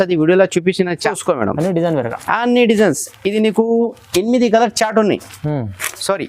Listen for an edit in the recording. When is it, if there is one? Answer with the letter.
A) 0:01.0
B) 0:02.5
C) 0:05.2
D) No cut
A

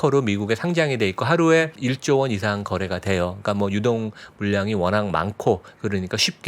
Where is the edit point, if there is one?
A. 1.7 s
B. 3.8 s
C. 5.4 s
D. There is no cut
A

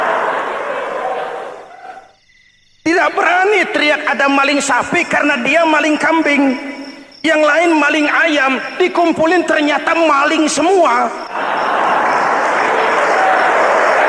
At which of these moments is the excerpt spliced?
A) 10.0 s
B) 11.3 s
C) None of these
B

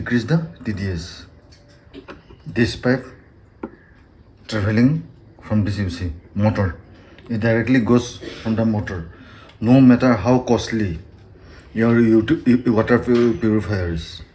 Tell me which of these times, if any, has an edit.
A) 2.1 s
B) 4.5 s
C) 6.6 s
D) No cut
A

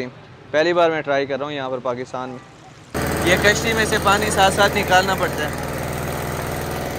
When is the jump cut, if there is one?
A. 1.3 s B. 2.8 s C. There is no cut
B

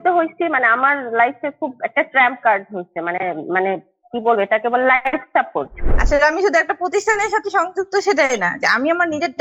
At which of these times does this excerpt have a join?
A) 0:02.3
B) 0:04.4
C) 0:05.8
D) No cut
C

